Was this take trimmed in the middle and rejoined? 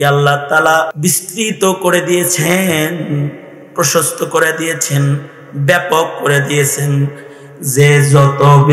yes; 1 cut; at 0.9 s

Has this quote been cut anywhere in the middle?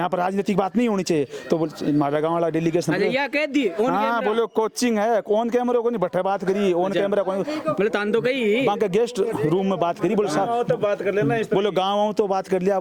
no; 0 cuts

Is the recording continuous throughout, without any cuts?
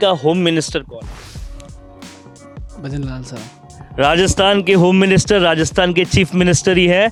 yes; 0 cuts

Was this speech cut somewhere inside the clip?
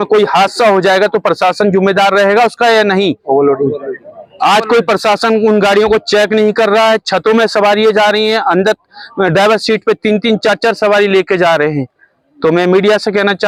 no; 0 cuts

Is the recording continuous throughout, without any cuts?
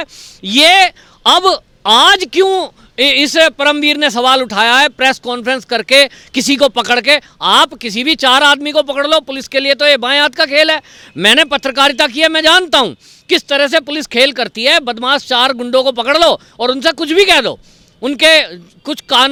yes; 0 cuts

